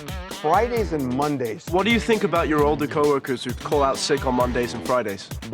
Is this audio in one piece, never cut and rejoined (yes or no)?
no